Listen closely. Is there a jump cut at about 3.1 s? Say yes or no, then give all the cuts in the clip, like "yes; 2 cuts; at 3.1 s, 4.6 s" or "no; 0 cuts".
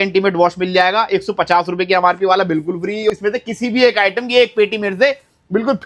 yes; 1 cut; at 3.1 s